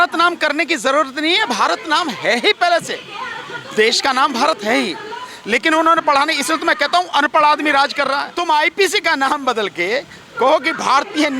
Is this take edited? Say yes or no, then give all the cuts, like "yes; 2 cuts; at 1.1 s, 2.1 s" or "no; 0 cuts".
yes; 1 cut; at 8.3 s